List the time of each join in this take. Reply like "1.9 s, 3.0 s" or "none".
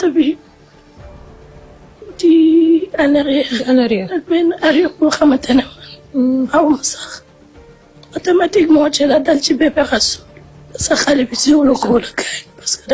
10.5 s